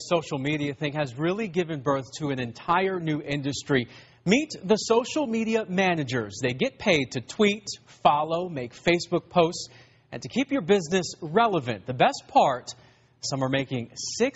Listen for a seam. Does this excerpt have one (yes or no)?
yes